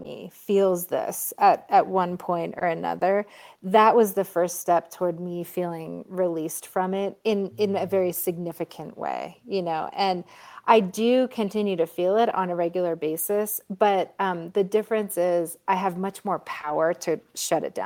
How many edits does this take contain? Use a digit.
0